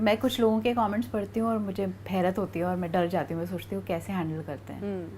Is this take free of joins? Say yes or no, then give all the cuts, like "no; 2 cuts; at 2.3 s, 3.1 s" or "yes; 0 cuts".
yes; 0 cuts